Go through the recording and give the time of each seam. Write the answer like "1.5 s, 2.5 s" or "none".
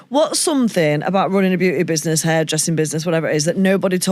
none